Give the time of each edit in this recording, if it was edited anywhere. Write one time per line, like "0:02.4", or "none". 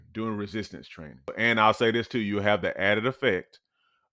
0:01.3